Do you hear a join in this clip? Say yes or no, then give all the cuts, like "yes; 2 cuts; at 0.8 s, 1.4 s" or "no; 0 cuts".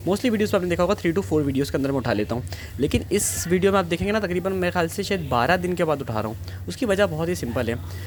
no; 0 cuts